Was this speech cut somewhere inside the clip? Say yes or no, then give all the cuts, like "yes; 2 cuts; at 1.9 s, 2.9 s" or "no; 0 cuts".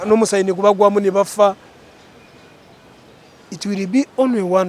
no; 0 cuts